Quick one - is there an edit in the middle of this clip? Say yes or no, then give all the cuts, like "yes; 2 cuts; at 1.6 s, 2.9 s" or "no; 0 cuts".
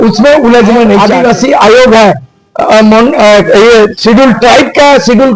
yes; 1 cut; at 1.0 s